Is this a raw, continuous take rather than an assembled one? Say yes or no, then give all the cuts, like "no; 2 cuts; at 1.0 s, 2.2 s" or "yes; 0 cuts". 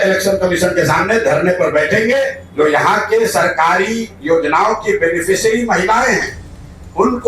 no; 1 cut; at 2.4 s